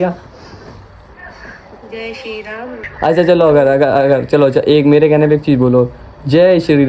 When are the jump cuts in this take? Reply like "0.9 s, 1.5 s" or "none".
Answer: 2.8 s